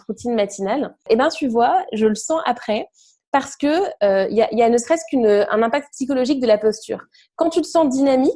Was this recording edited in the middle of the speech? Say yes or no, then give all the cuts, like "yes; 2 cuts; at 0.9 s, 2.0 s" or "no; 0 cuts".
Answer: yes; 1 cut; at 1.1 s